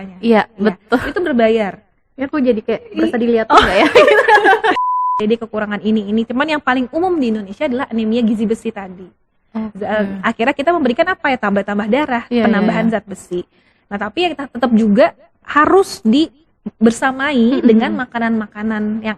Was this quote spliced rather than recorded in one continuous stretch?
yes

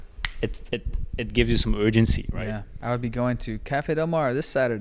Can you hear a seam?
yes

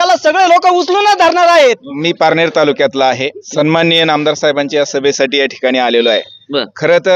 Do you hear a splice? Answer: yes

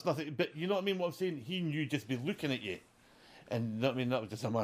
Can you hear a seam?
no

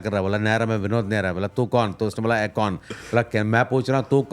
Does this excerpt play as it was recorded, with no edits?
yes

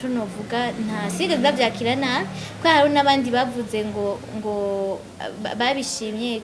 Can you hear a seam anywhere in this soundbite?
no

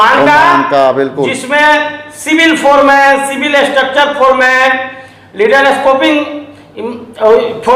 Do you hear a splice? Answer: no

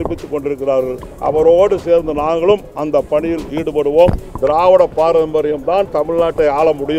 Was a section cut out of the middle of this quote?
yes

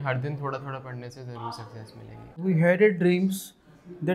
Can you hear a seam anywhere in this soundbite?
yes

